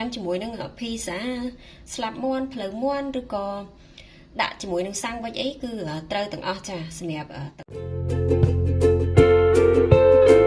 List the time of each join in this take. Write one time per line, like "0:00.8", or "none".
0:07.5